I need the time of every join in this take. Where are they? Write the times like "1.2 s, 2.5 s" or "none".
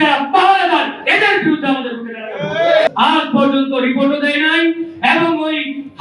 2.9 s